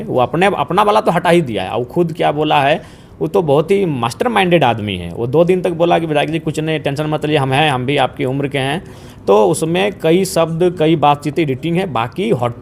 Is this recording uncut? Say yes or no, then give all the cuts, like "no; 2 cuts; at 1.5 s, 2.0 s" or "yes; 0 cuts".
yes; 0 cuts